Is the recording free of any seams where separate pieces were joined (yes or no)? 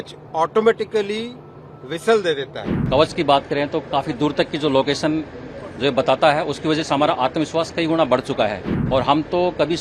no